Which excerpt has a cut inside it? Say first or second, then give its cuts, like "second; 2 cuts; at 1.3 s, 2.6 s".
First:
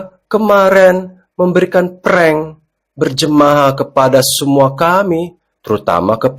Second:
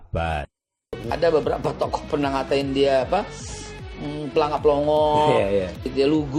second; 1 cut; at 1.0 s